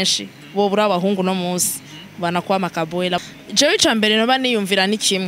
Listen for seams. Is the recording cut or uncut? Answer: cut